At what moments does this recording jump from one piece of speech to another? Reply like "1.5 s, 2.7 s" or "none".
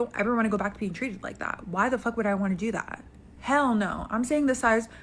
2.2 s